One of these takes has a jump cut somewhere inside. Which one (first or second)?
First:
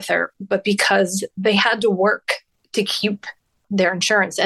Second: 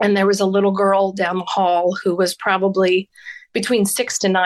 first